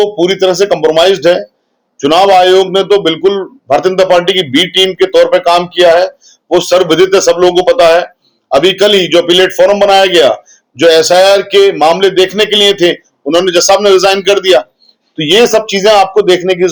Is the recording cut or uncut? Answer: uncut